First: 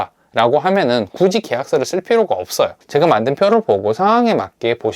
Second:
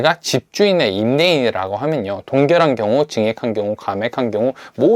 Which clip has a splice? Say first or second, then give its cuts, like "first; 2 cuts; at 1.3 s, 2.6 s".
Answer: first; 1 cut; at 2.8 s